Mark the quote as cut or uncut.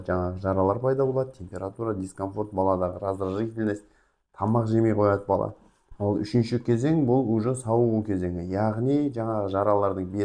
uncut